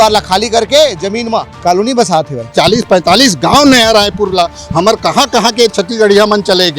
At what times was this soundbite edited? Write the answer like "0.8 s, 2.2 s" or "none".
1.5 s, 2.5 s